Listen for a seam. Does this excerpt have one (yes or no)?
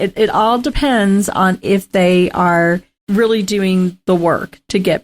yes